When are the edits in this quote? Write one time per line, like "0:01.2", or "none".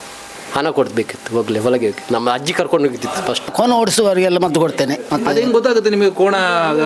0:03.5
0:05.0